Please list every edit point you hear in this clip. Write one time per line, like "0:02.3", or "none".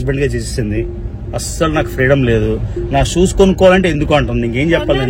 none